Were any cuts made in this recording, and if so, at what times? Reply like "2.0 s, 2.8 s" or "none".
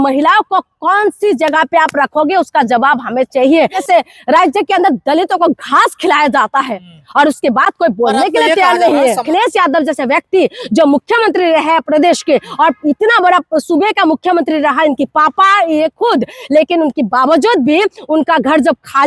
3.8 s, 9.2 s